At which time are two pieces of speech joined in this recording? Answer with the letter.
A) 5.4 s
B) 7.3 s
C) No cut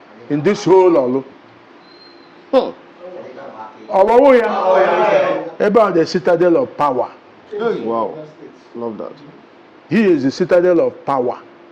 A